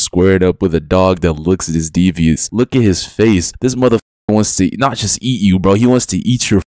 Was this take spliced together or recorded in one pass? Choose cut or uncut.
uncut